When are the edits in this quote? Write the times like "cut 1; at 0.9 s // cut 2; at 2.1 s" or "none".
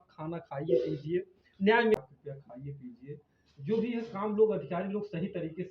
cut 1; at 2.0 s